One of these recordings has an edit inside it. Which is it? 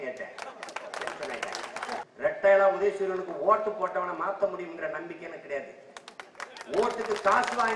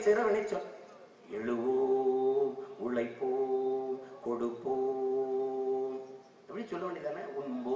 first; 1 cut; at 2.0 s

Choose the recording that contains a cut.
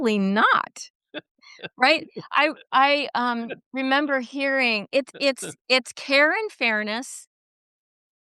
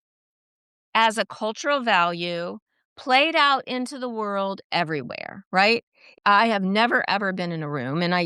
second; 1 cut; at 6.2 s

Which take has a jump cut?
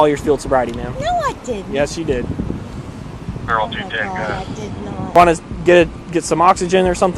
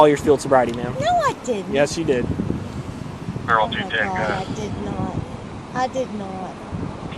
first; 1 cut; at 5.1 s

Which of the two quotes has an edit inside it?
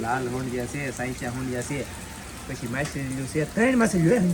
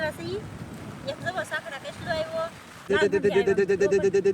second; 1 cut; at 2.9 s

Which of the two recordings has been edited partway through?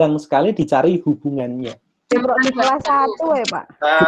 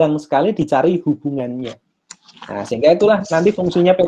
first; 1 cut; at 2.1 s

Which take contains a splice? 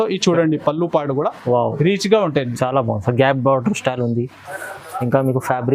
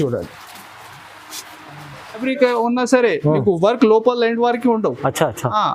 second; 1 cut; at 2.2 s

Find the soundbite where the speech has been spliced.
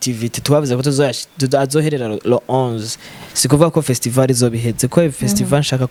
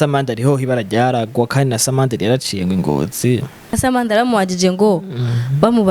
second; 1 cut; at 3.7 s

